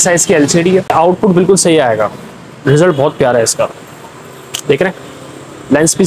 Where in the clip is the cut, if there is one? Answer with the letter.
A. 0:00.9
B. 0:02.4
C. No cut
A